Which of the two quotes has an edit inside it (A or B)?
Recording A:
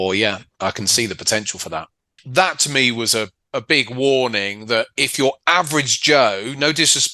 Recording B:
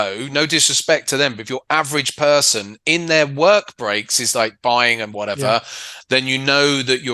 A